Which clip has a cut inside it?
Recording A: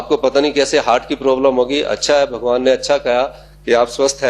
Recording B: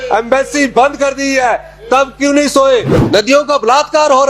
B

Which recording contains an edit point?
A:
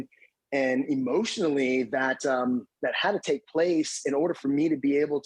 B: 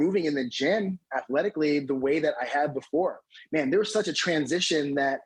A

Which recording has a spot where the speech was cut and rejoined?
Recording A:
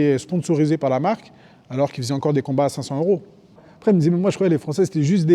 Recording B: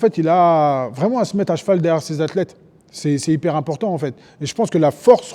A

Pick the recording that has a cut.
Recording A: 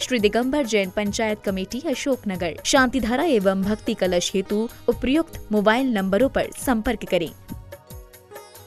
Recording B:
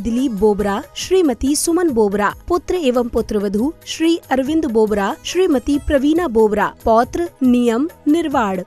A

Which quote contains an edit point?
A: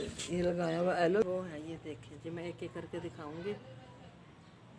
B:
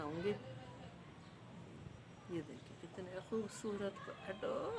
A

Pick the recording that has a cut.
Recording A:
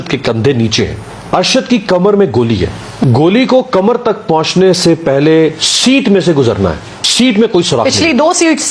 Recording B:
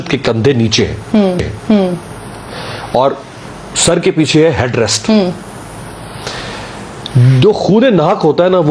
A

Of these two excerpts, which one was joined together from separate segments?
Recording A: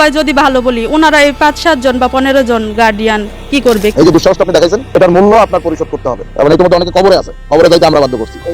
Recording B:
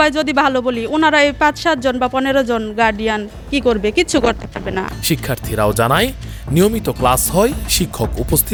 A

